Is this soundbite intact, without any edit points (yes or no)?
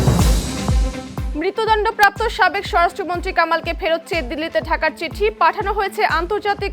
no